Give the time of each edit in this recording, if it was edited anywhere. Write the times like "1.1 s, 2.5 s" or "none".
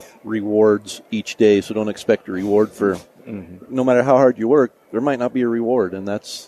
none